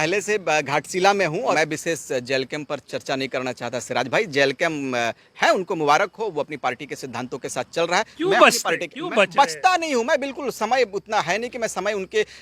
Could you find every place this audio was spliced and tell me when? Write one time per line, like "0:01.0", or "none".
0:01.6